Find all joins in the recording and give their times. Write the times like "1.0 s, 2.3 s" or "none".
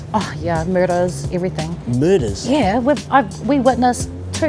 none